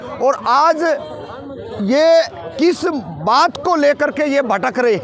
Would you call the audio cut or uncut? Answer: uncut